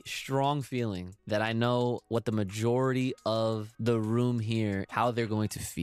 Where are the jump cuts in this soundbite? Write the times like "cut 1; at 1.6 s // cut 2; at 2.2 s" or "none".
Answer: cut 1; at 1.1 s // cut 2; at 2.0 s // cut 3; at 3.7 s // cut 4; at 4.8 s